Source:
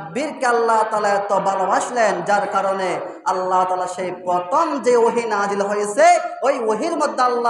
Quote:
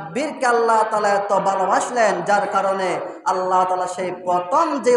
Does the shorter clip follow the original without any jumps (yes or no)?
yes